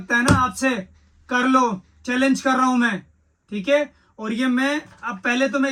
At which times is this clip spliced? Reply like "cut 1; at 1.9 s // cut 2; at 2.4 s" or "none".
none